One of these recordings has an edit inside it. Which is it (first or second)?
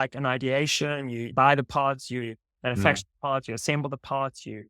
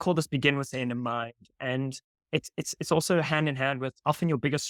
first